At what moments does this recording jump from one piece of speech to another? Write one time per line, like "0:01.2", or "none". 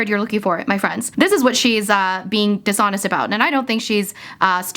none